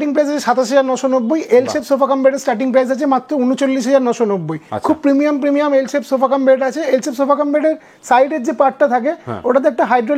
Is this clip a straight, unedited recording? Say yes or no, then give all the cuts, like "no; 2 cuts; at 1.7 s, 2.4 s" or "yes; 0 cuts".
yes; 0 cuts